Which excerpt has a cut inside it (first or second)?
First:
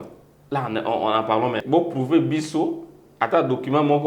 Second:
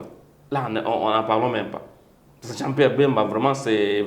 first